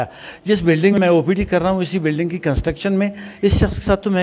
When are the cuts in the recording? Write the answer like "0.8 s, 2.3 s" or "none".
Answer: 0.9 s